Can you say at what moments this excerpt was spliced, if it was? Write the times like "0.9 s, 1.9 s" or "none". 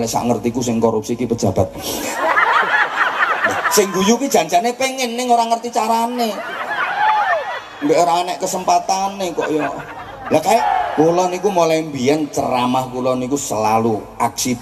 10.6 s

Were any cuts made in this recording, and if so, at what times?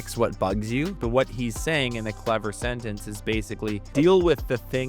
1.0 s, 3.8 s

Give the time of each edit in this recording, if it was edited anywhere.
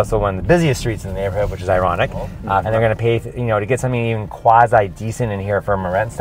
2.7 s

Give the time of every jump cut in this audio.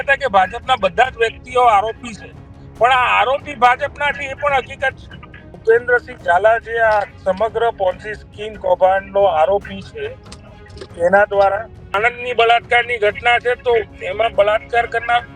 5.5 s, 11.9 s

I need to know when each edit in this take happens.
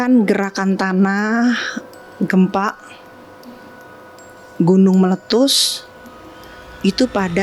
none

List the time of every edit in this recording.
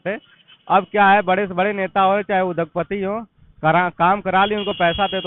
none

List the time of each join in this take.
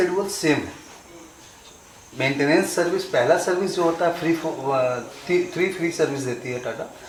none

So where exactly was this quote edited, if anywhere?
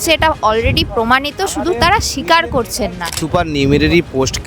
3.2 s

